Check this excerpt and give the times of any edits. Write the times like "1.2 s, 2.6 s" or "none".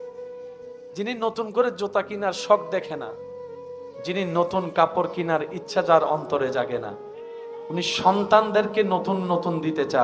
1.0 s